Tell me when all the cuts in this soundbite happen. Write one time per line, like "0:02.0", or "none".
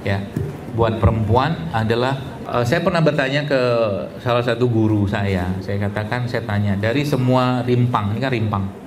0:02.3